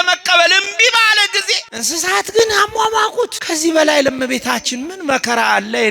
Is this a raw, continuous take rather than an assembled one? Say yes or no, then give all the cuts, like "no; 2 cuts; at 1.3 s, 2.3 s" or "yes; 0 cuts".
no; 2 cuts; at 1.7 s, 3.4 s